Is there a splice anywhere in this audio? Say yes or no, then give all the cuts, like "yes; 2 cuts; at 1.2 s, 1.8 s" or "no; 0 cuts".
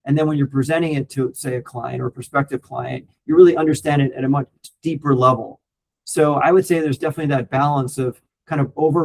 no; 0 cuts